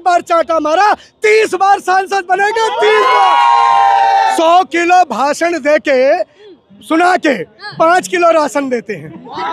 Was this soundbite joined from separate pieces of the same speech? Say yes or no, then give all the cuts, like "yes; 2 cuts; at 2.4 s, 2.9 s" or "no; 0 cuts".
yes; 1 cut; at 4.3 s